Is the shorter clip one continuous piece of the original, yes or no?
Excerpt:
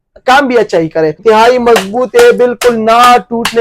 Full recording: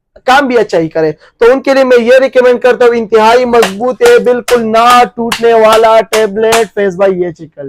no